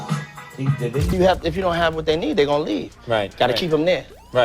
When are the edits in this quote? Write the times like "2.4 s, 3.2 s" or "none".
1.2 s

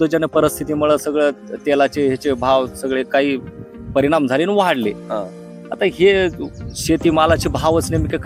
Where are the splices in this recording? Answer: none

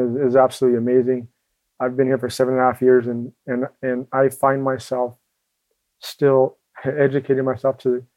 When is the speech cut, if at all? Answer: none

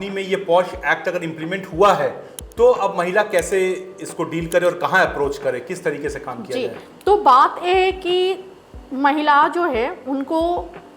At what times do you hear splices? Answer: none

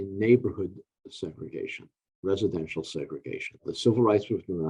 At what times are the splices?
none

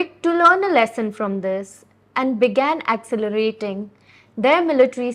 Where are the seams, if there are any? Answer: none

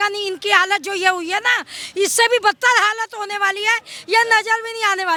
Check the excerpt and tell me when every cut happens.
none

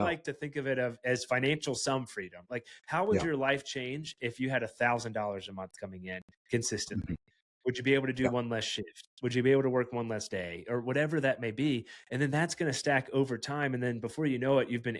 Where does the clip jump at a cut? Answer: 2.4 s

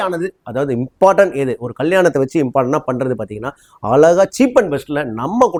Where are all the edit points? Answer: none

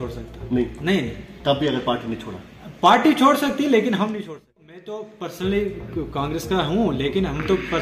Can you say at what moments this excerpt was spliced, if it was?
4.2 s

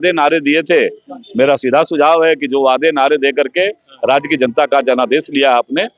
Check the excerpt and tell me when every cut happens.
none

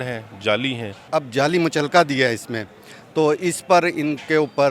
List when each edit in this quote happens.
1.0 s

